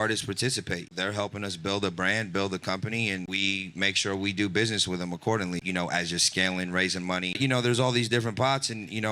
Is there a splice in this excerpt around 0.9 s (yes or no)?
yes